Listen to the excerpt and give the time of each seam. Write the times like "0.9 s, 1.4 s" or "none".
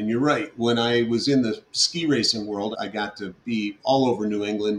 2.7 s